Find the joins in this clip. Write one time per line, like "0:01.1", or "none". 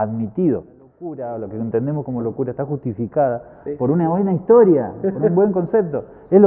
0:01.1